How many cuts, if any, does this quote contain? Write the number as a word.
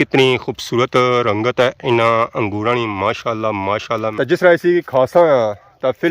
one